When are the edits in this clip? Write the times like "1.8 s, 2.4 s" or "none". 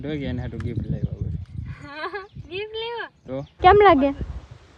3.5 s